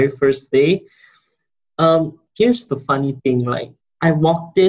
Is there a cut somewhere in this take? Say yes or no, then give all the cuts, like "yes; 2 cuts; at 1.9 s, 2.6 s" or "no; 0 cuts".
yes; 1 cut; at 2.2 s